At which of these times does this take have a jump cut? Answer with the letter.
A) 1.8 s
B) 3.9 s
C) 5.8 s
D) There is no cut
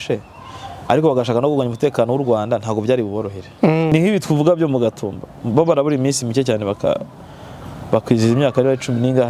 B